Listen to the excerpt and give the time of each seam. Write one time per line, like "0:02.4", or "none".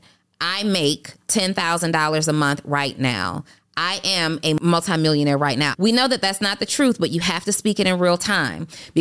0:04.6
0:05.7